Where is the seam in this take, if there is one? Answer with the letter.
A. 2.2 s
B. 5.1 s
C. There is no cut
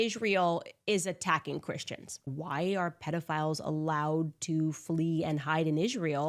A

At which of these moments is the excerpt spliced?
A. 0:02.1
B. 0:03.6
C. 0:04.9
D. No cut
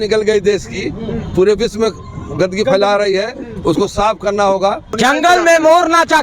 C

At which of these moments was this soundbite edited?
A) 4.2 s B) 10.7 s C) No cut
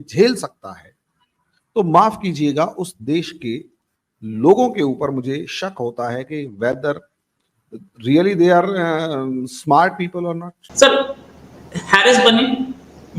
B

